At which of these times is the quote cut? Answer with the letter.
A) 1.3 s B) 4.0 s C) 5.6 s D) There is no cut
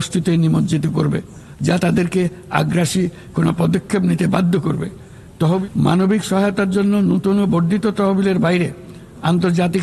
C